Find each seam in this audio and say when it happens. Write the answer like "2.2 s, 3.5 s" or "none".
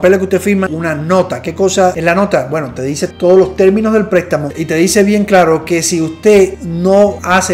2.0 s